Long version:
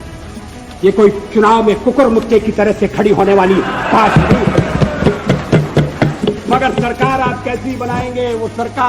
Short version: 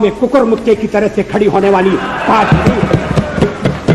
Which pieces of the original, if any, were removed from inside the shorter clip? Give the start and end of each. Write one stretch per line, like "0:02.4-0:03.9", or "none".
none